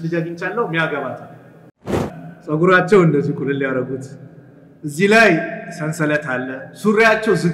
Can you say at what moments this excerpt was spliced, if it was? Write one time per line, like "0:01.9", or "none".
0:02.1